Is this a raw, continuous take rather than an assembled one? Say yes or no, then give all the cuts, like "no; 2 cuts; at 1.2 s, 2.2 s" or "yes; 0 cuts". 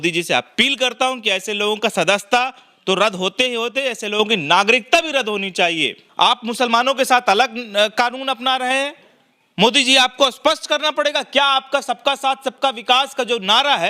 no; 1 cut; at 6.0 s